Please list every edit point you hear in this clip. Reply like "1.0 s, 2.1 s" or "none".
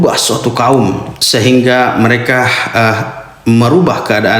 none